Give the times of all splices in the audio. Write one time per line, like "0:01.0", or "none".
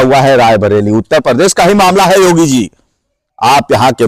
none